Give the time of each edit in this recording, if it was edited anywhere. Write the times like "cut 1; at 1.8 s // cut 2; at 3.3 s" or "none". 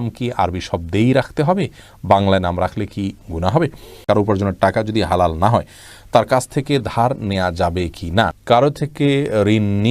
cut 1; at 3.9 s // cut 2; at 8.4 s